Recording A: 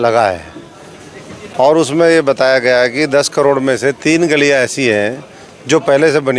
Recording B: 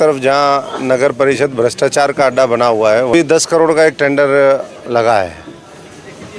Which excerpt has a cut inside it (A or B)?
B